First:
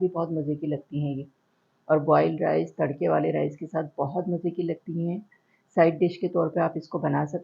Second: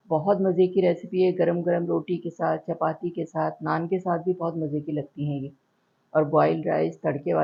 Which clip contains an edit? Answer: first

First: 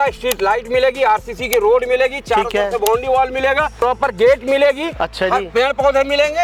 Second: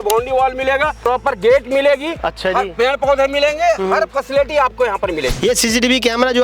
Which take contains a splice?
second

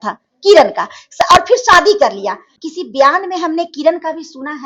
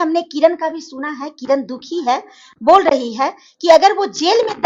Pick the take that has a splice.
first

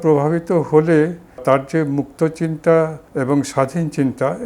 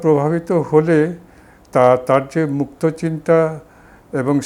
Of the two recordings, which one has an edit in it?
first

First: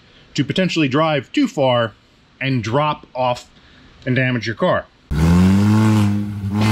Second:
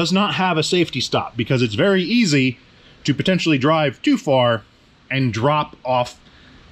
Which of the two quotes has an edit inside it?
first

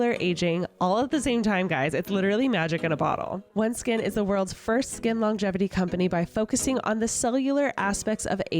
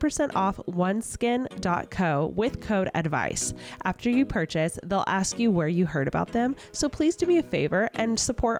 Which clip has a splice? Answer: first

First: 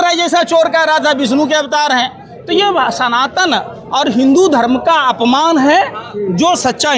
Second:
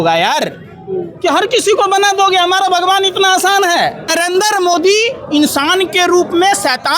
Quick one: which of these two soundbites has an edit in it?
second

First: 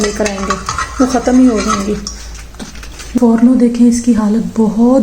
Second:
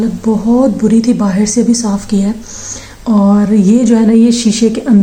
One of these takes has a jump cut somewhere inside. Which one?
first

